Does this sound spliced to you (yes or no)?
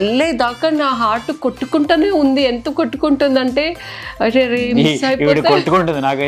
no